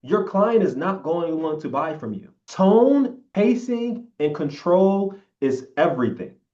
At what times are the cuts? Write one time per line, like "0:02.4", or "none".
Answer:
0:03.2